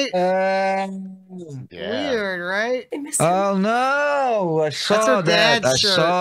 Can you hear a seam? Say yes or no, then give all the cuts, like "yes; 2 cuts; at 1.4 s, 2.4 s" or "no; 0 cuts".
yes; 1 cut; at 2.9 s